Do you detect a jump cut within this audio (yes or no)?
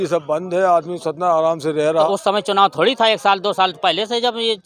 yes